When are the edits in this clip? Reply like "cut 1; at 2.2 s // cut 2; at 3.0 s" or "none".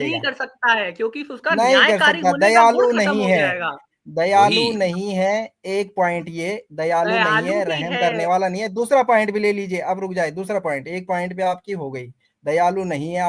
none